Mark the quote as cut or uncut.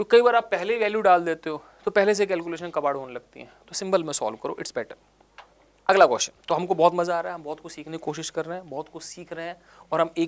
uncut